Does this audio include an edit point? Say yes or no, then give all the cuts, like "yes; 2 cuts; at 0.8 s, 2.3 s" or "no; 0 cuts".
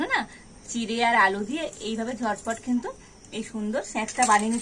no; 0 cuts